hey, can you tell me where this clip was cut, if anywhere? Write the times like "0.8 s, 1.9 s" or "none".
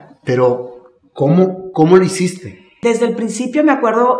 2.7 s